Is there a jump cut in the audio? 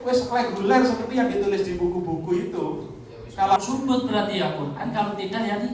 yes; 1 cut; at 3.6 s

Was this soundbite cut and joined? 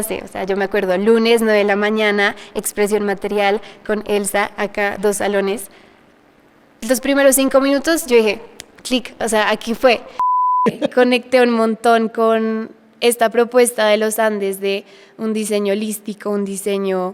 yes; 1 cut; at 10.6 s

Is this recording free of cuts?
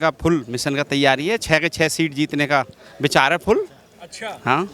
yes; 0 cuts

